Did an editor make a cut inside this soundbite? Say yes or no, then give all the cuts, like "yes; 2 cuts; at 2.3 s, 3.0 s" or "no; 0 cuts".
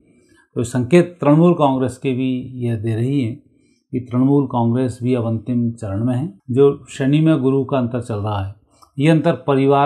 yes; 1 cut; at 6.3 s